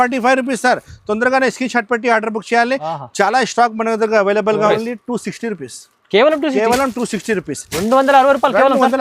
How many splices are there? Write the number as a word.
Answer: one